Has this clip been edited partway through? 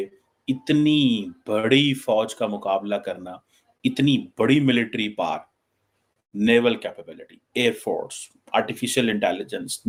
no; 0 cuts

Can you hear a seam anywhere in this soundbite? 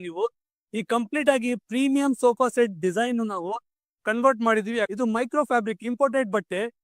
yes; 1 cut; at 4.9 s

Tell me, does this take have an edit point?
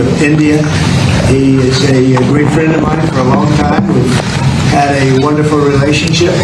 no; 0 cuts

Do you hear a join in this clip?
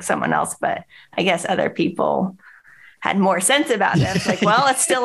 no; 0 cuts

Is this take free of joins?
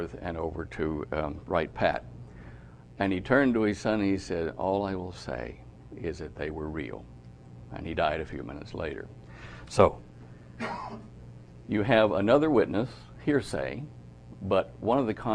no; 1 cut; at 9.7 s

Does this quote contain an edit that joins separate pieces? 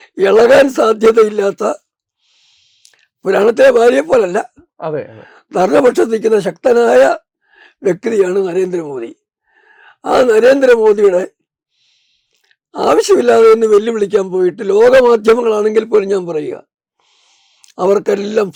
no; 0 cuts

